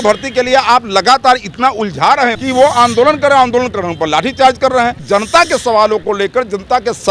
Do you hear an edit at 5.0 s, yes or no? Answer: yes